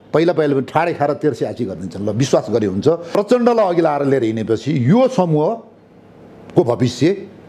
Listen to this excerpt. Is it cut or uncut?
cut